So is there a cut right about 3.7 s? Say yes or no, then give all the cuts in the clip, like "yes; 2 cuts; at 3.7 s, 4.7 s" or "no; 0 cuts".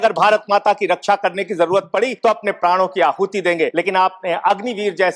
yes; 2 cuts; at 2.1 s, 3.7 s